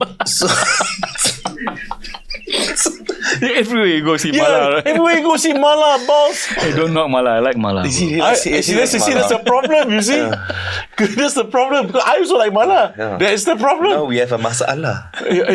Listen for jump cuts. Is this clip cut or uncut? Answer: uncut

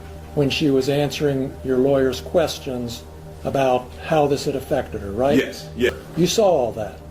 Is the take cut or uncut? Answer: cut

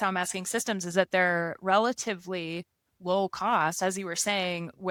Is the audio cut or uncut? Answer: uncut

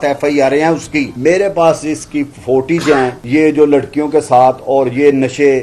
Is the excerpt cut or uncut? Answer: cut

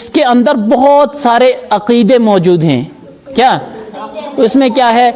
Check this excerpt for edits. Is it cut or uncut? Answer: uncut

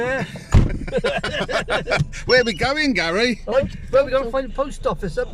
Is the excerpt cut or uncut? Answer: uncut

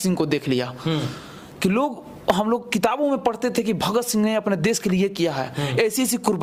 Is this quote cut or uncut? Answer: uncut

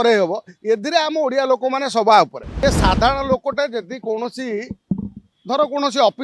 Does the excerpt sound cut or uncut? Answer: cut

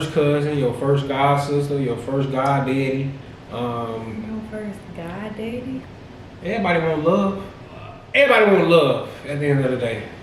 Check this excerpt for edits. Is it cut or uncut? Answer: cut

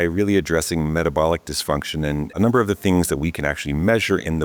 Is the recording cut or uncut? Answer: cut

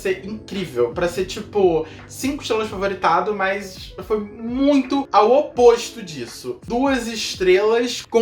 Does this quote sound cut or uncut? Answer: cut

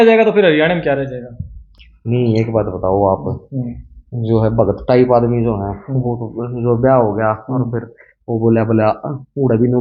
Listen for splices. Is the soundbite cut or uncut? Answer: uncut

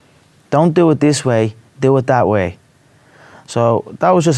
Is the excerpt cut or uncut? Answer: uncut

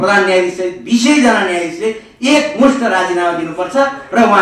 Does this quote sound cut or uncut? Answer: uncut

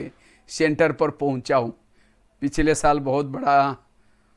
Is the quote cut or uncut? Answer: uncut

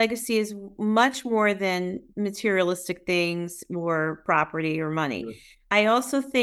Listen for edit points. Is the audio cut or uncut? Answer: cut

